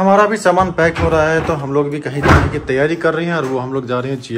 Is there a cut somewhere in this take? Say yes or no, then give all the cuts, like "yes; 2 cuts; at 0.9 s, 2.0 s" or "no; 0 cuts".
no; 0 cuts